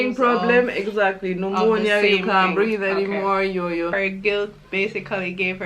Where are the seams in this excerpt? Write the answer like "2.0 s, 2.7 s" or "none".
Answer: 3.9 s